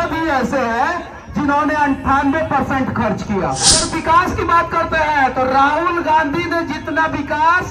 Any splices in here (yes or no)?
yes